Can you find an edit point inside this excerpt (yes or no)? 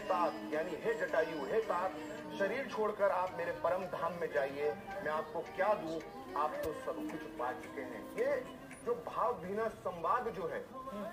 no